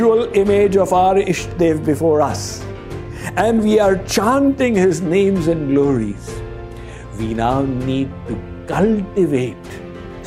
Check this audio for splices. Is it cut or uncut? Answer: uncut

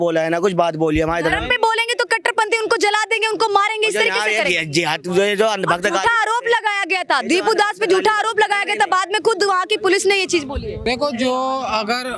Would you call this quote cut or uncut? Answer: cut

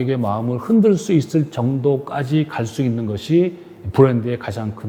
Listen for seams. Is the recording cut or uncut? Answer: uncut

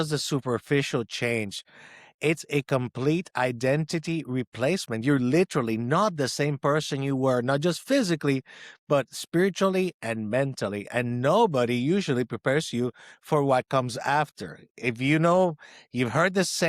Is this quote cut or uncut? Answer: uncut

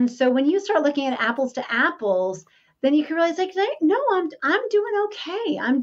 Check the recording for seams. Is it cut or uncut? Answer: uncut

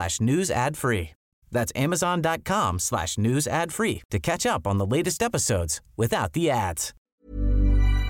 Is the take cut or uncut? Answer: cut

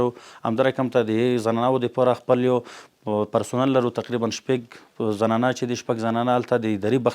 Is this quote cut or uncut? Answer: uncut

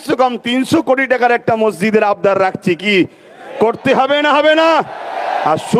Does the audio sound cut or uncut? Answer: uncut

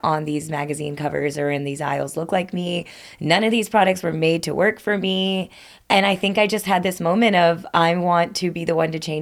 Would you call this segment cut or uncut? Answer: uncut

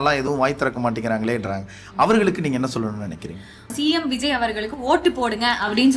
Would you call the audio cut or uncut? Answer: cut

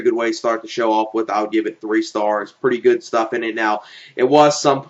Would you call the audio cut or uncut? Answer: uncut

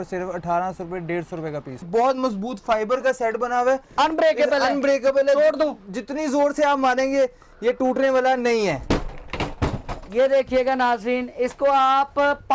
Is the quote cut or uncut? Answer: cut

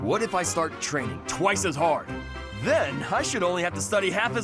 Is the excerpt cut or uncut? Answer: uncut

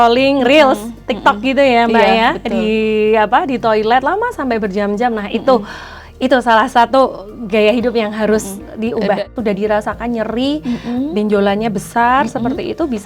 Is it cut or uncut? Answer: cut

